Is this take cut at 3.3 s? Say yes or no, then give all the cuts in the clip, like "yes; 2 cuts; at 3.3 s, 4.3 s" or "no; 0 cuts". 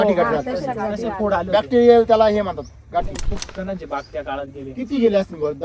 yes; 1 cut; at 3.3 s